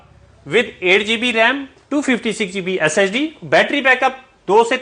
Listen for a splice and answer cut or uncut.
uncut